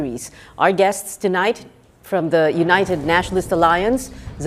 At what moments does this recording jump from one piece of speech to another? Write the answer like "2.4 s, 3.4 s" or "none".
1.1 s